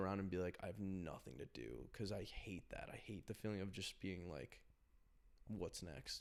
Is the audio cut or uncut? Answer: uncut